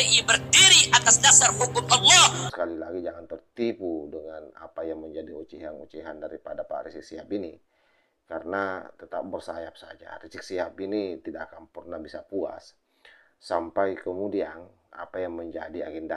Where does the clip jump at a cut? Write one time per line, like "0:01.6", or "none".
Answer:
0:02.5